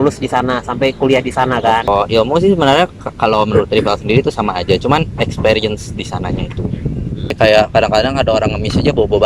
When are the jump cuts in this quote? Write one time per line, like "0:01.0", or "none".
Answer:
0:01.9
0:07.4